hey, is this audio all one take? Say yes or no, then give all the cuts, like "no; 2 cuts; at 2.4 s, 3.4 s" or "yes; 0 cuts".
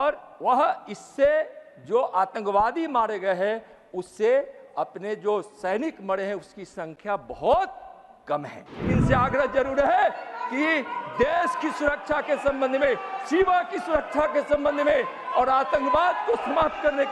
no; 1 cut; at 8.9 s